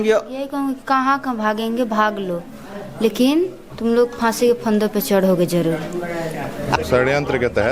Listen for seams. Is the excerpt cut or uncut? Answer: cut